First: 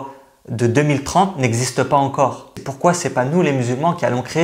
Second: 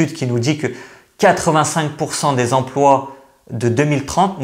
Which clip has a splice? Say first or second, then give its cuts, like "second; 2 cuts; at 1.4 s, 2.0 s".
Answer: first; 1 cut; at 2.6 s